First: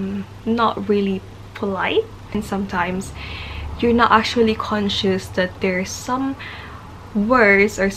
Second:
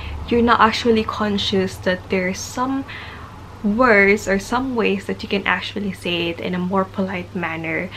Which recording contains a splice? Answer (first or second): first